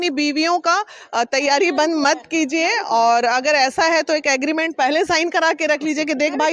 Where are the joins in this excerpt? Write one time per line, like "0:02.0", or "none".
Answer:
none